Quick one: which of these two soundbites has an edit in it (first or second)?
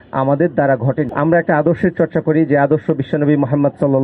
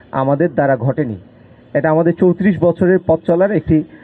first